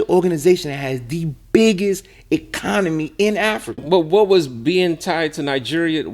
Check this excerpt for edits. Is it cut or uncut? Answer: cut